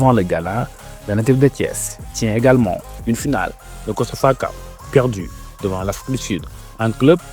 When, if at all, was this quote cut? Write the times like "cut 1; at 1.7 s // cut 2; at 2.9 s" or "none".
none